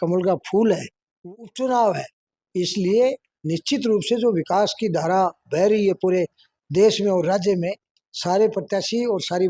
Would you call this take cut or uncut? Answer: cut